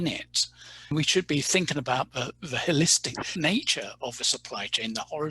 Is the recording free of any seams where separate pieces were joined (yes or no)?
no